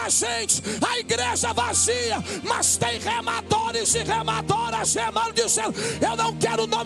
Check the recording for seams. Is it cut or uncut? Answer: uncut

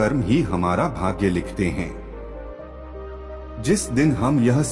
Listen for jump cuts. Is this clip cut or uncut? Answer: cut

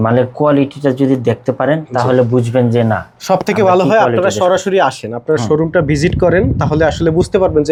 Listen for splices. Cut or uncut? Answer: uncut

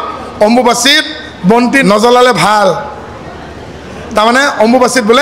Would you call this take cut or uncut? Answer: uncut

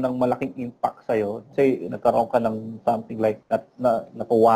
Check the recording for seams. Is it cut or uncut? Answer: cut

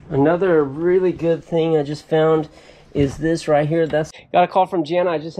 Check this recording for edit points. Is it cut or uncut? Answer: cut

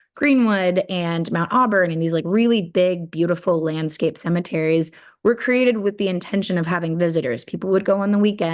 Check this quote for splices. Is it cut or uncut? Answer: uncut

